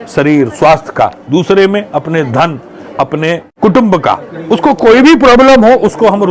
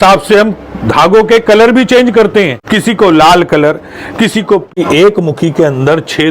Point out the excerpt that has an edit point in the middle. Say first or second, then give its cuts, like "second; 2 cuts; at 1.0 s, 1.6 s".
second; 2 cuts; at 2.6 s, 4.7 s